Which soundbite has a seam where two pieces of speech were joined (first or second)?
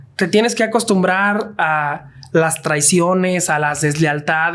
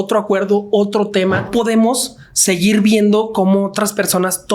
second